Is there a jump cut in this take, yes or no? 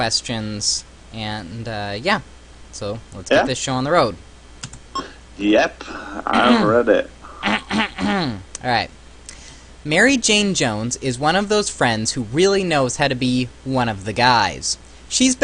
yes